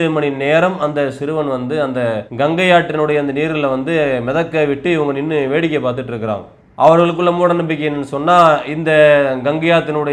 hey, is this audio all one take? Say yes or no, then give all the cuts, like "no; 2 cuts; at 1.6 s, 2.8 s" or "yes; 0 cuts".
no; 1 cut; at 2.3 s